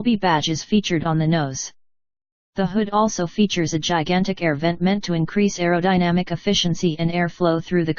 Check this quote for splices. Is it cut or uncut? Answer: uncut